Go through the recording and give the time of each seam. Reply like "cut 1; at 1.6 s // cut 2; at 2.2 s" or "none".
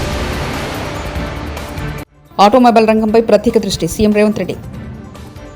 cut 1; at 2.0 s